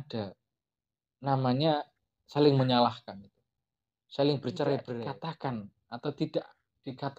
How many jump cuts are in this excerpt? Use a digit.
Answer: 1